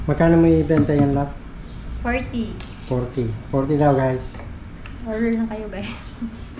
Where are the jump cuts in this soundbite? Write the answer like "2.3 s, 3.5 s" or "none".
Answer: none